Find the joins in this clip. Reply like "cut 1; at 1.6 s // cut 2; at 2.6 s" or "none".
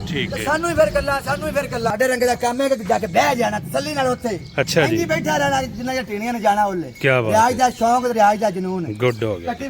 cut 1; at 1.9 s